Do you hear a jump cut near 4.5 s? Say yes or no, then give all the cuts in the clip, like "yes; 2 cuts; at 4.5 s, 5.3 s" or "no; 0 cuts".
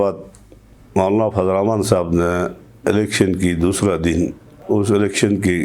yes; 1 cut; at 4.5 s